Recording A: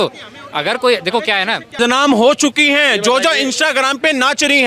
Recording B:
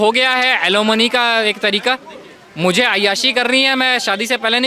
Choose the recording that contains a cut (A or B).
A